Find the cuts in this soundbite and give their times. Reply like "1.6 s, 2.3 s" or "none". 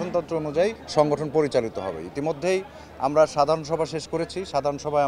none